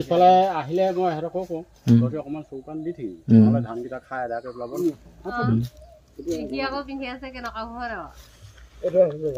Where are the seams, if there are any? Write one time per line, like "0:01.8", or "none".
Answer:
0:04.7